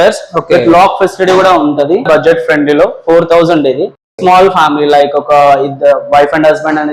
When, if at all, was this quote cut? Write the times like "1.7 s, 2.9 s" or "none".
2.1 s